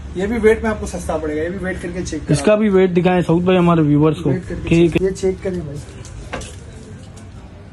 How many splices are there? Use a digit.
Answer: 1